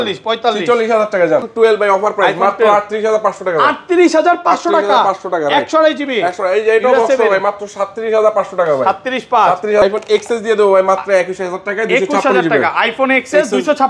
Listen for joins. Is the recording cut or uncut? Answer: cut